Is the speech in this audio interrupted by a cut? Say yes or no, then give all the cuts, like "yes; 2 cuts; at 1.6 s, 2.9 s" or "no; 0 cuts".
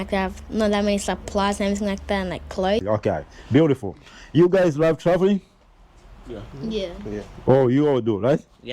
yes; 1 cut; at 2.8 s